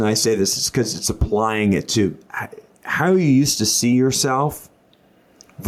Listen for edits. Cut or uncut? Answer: uncut